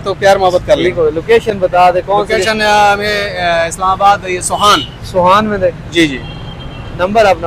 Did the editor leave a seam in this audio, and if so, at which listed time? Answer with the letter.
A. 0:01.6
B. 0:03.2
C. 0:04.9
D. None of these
D